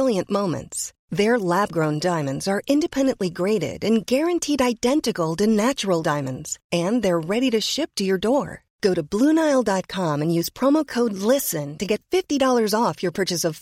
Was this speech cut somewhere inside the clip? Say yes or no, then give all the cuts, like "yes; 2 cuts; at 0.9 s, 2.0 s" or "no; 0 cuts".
no; 0 cuts